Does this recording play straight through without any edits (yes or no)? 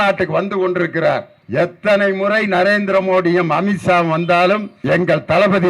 no